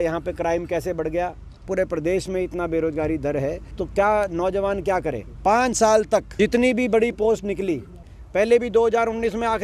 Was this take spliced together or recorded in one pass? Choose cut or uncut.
cut